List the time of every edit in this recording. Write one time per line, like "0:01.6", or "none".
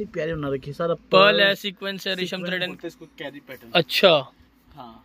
0:02.7